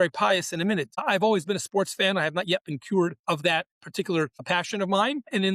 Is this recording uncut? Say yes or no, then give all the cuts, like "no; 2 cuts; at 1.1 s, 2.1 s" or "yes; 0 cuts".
no; 1 cut; at 0.9 s